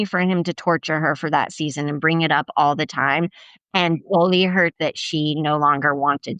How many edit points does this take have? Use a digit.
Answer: 0